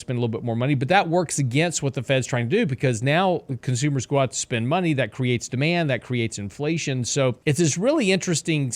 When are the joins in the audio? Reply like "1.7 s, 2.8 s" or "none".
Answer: 7.4 s